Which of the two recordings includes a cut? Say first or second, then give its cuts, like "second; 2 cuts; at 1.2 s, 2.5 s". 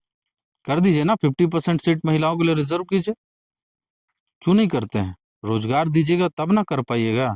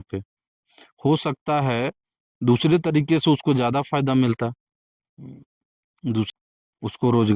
second; 1 cut; at 6.3 s